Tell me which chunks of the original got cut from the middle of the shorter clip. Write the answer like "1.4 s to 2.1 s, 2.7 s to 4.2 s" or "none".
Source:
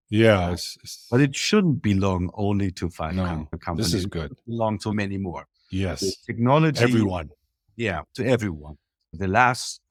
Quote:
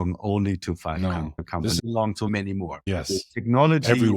3.9 s to 4.4 s, 5.5 s to 5.7 s